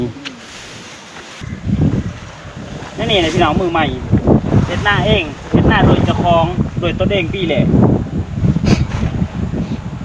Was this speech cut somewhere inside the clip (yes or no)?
yes